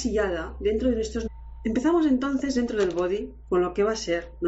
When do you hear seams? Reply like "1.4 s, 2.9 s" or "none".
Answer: none